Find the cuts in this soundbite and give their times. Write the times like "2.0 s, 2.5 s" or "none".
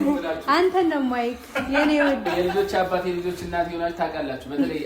2.3 s